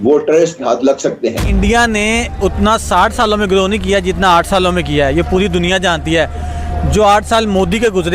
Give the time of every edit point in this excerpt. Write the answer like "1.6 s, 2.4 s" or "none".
1.5 s